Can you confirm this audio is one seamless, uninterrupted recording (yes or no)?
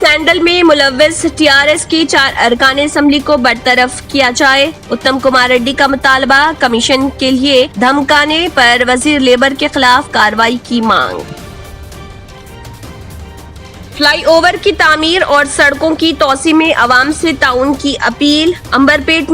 yes